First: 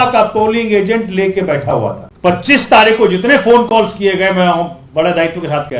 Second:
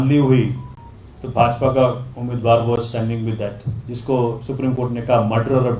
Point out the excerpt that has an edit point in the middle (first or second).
first